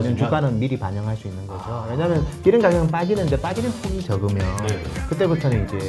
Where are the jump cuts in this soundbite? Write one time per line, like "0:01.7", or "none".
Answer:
none